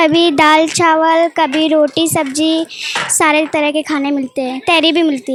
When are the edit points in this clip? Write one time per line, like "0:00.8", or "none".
none